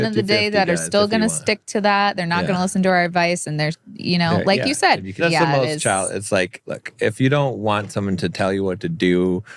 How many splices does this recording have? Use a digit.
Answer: 1